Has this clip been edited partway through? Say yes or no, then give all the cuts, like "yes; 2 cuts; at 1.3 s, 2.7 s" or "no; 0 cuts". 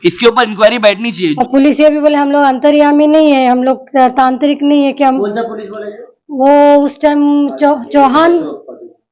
yes; 1 cut; at 1.1 s